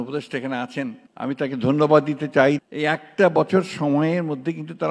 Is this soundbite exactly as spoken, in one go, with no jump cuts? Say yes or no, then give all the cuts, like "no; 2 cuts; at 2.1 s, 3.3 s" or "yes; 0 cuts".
no; 1 cut; at 2.6 s